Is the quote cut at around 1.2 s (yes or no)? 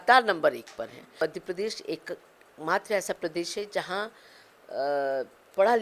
yes